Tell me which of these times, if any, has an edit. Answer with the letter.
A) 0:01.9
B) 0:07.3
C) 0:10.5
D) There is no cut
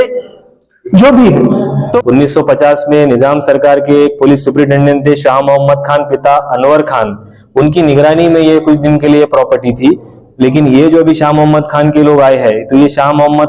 A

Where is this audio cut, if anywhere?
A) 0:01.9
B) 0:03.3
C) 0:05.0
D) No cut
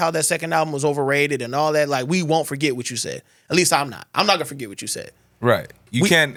D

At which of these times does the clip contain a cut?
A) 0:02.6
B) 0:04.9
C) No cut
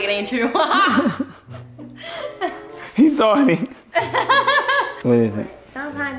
B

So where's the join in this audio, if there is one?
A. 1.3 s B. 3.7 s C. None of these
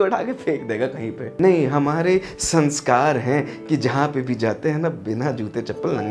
A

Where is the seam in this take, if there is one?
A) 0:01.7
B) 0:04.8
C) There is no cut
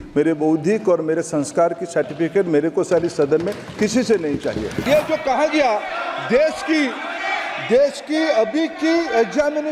B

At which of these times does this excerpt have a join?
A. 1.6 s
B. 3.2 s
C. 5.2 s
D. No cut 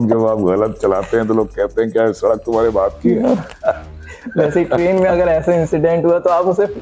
D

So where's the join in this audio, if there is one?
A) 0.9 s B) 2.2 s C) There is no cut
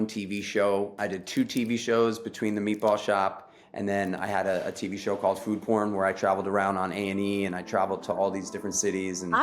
A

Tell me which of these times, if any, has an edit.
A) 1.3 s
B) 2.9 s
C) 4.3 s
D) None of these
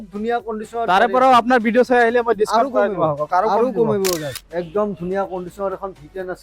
C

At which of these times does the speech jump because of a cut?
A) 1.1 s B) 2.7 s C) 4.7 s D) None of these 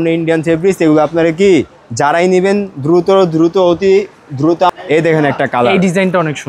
C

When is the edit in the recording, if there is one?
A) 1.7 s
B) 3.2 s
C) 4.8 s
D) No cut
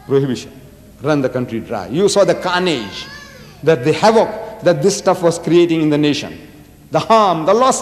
A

